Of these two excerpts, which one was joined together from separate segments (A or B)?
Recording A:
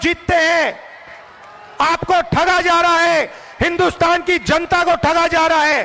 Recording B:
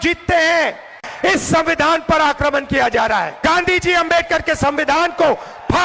B